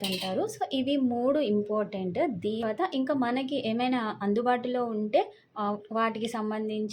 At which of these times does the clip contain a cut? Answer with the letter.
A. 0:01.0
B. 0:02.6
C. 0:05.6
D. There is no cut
B